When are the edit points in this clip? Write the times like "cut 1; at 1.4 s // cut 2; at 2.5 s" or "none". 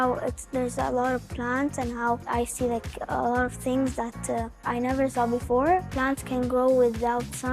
cut 1; at 2.3 s // cut 2; at 4.7 s // cut 3; at 5.9 s